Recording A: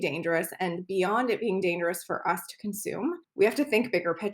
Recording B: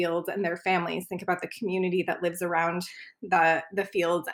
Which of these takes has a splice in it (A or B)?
A